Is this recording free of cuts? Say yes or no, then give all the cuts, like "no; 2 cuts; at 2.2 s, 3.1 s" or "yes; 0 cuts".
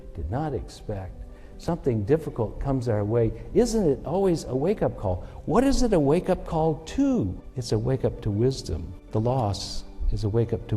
no; 2 cuts; at 7.5 s, 8.9 s